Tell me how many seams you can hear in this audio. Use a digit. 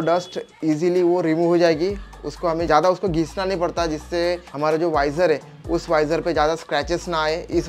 0